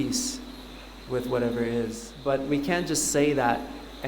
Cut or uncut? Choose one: cut